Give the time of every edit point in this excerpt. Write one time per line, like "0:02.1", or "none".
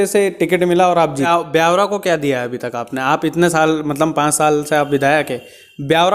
0:01.3